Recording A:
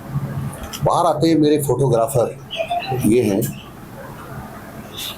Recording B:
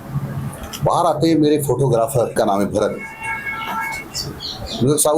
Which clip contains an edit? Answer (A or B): B